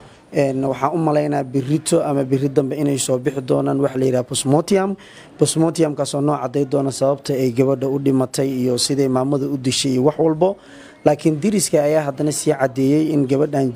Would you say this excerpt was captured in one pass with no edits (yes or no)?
yes